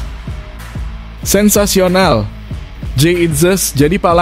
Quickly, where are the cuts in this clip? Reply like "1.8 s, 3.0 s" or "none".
1.3 s